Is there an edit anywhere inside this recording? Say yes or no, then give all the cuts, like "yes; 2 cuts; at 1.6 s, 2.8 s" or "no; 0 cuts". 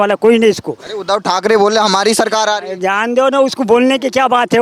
no; 0 cuts